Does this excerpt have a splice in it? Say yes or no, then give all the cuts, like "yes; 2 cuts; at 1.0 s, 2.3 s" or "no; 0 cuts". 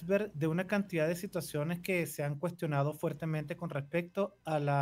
no; 0 cuts